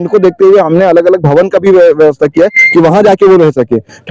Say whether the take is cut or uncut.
uncut